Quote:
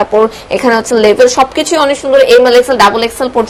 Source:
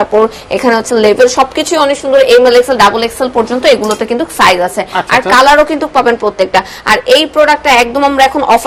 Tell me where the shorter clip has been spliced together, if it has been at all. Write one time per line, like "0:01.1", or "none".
none